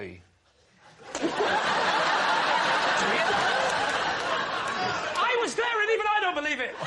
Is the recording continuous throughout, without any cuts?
yes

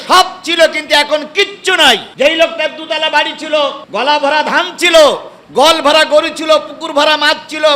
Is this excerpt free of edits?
no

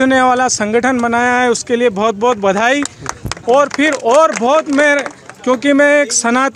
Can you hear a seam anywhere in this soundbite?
no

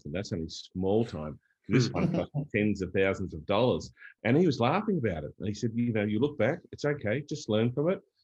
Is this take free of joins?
yes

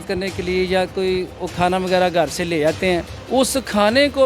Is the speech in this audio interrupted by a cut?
yes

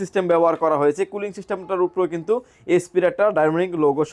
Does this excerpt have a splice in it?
no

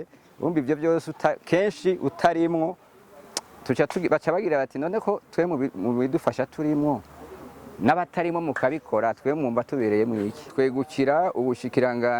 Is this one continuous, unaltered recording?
no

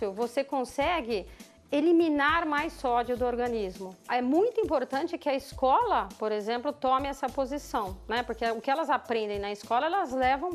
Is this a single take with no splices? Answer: no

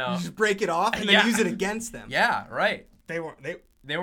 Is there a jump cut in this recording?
yes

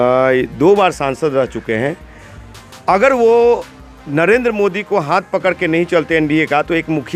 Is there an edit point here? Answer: no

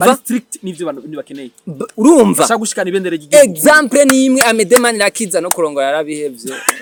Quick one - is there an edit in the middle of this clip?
no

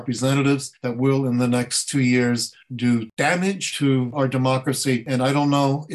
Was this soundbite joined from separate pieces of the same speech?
yes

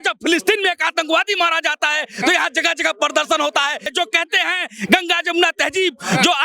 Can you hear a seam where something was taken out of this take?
yes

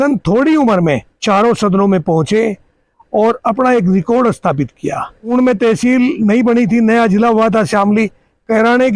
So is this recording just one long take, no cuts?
no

